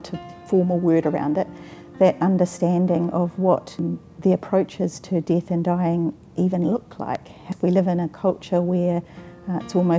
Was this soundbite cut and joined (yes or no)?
yes